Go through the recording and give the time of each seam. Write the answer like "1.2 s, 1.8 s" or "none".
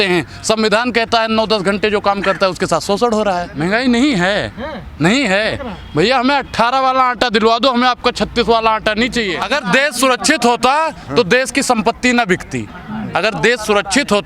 3.5 s, 9.4 s